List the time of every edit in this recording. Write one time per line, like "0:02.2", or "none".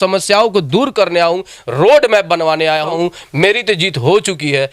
0:02.9

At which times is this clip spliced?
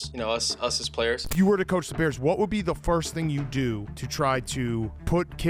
0:01.2

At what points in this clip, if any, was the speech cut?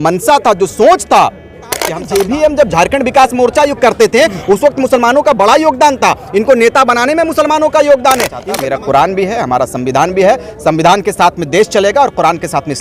0:02.0
0:08.4

